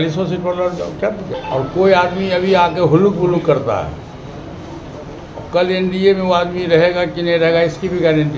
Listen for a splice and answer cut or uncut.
cut